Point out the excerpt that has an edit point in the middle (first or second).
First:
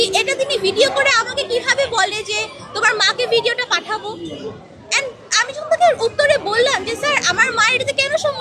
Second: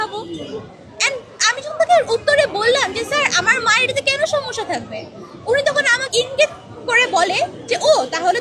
second